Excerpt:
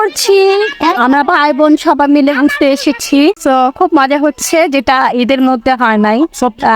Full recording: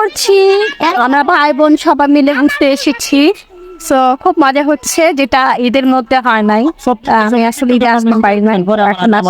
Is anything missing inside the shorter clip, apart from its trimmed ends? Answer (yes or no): yes